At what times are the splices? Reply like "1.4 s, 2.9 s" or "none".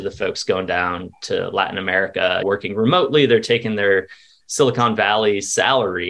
2.4 s